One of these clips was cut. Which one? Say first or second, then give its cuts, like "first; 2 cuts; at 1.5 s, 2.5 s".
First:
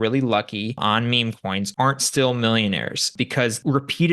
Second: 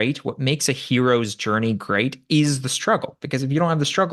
first; 2 cuts; at 1.1 s, 3.1 s